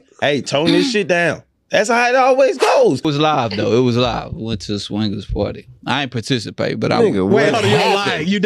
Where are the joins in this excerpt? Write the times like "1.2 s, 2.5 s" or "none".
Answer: 3.0 s